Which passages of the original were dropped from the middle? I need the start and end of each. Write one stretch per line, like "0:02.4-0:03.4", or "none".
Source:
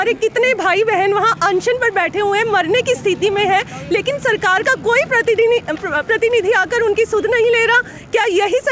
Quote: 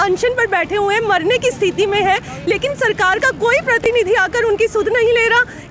0:05.3-0:06.2